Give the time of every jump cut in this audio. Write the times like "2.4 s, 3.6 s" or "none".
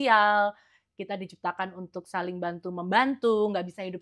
none